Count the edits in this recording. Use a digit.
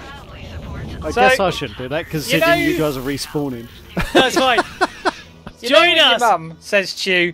1